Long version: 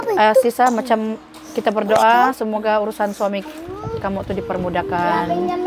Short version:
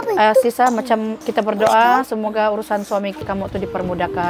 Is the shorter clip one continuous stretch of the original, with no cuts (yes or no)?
no